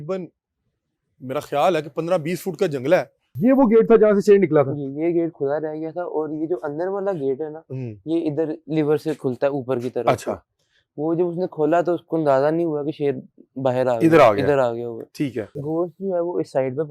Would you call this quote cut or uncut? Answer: cut